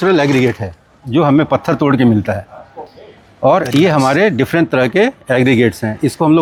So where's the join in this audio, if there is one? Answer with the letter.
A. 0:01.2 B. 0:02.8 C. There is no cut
C